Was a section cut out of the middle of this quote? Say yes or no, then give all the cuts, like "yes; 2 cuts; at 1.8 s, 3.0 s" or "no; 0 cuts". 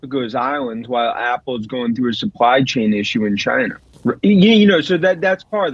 no; 0 cuts